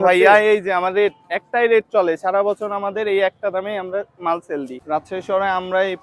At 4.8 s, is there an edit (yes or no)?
yes